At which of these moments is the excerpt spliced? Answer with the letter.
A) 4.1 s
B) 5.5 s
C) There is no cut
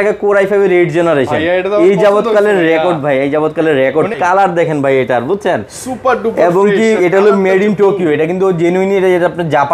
A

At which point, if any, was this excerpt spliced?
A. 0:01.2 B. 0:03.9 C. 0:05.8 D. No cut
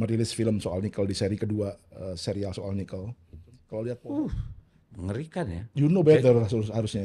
B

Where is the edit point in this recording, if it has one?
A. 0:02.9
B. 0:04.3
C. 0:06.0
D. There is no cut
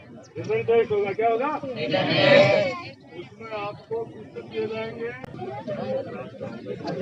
D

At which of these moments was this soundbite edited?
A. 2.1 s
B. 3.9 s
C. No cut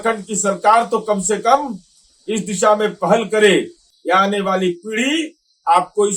B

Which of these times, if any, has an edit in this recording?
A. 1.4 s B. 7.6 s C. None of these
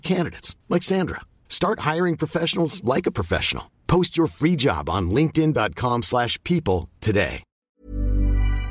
B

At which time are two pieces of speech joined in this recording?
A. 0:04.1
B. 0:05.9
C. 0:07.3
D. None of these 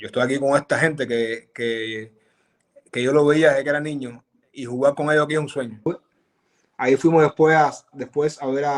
B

